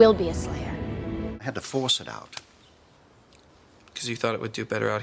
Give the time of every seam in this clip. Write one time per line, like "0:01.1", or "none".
0:01.5